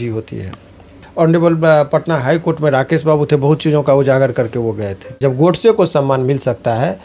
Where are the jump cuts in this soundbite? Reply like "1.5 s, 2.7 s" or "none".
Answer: 1.0 s, 5.2 s